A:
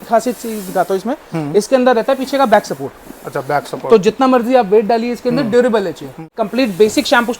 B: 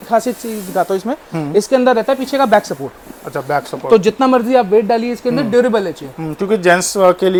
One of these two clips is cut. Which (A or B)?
A